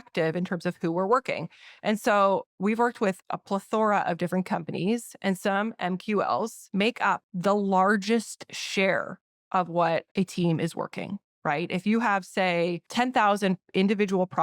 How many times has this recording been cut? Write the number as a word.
three